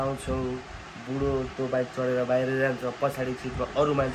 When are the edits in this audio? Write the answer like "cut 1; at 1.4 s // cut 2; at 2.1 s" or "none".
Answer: none